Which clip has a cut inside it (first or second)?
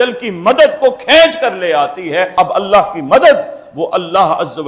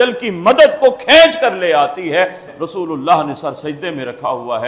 first